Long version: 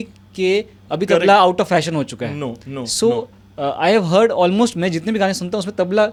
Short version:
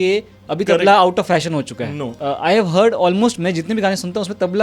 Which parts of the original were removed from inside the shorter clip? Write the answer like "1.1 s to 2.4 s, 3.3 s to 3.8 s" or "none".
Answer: 2.5 s to 3.4 s